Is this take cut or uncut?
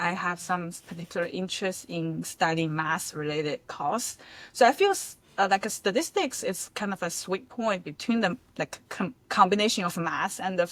uncut